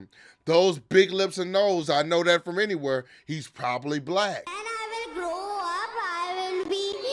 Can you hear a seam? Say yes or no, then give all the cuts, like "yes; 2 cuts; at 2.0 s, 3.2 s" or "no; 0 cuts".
yes; 1 cut; at 4.6 s